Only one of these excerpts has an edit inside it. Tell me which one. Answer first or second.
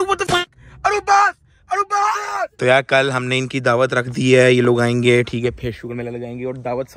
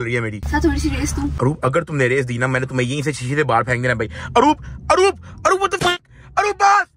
first